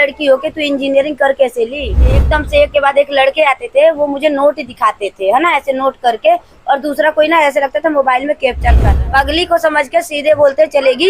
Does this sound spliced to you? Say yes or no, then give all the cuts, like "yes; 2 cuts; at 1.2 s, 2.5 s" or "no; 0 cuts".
yes; 2 cuts; at 2.2 s, 8.9 s